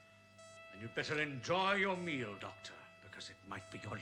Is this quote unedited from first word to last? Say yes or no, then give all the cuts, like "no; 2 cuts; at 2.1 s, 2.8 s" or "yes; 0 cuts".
yes; 0 cuts